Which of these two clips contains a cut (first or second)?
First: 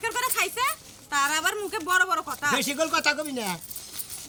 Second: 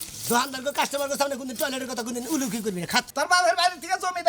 second